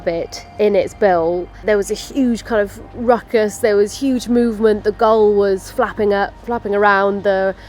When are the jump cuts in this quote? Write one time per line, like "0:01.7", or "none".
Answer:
0:01.5

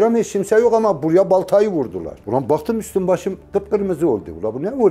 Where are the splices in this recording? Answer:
0:02.1

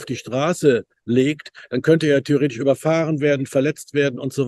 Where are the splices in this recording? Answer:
none

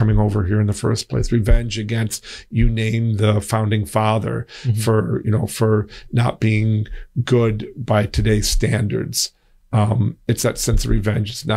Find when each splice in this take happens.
none

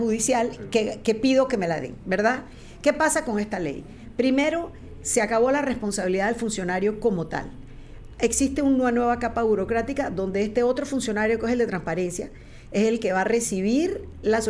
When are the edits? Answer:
none

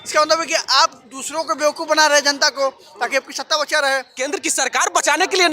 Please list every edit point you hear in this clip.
0:04.2

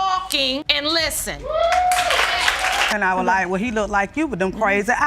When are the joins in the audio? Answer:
0:02.9

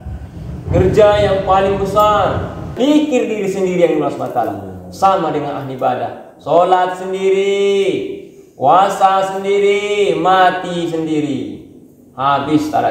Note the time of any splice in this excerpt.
0:02.7

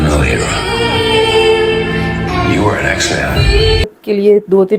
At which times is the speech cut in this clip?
0:03.8

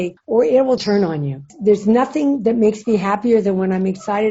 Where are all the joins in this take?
0:01.5

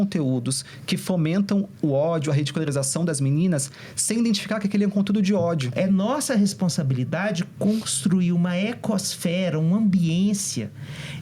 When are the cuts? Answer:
0:05.7

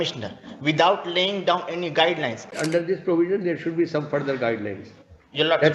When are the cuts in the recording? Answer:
0:02.5

